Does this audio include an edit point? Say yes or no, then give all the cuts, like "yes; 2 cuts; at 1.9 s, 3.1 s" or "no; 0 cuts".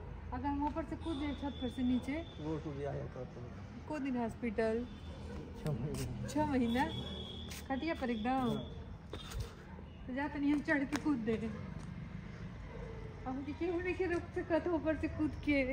no; 0 cuts